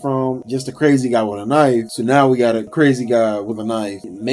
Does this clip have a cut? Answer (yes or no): yes